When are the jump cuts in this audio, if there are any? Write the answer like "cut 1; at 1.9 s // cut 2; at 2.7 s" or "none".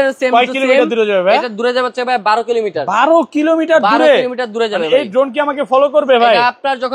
none